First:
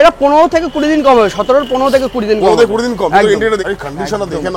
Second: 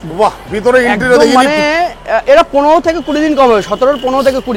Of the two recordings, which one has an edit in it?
first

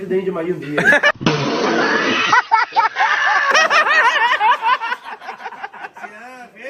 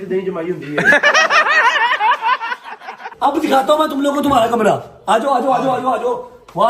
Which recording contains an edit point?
second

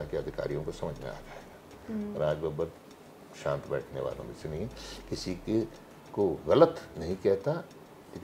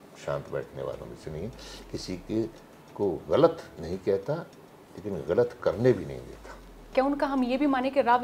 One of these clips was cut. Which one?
second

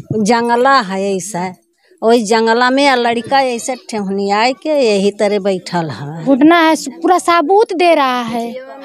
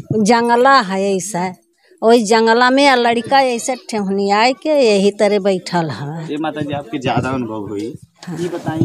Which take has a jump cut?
first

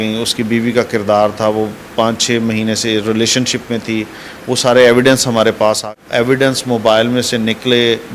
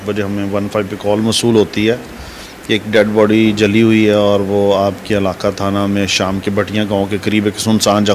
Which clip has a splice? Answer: first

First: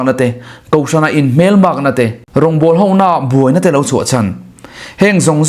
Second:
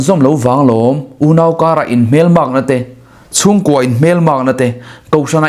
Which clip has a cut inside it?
first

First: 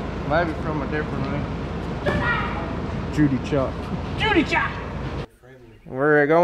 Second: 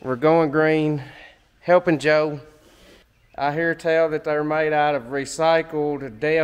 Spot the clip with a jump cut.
first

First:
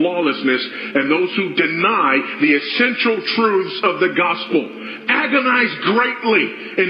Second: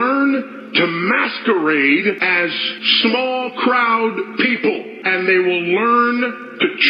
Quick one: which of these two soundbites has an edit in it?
second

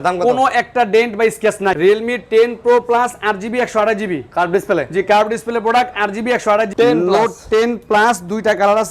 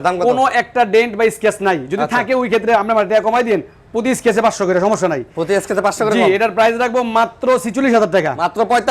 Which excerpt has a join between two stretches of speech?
first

